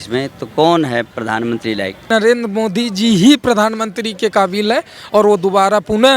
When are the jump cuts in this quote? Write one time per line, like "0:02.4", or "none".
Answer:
0:02.1